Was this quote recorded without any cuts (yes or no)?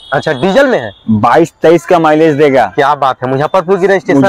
yes